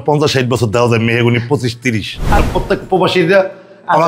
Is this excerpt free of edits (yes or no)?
no